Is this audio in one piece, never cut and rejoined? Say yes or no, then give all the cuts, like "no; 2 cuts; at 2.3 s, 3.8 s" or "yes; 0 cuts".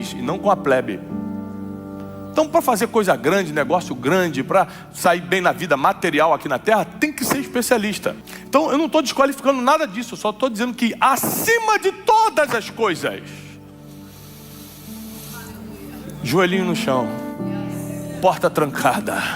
no; 1 cut; at 8.3 s